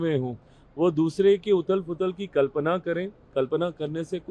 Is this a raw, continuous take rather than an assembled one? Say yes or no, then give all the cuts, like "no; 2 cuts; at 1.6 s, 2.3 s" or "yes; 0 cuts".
yes; 0 cuts